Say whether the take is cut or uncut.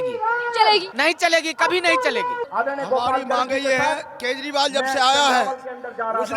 cut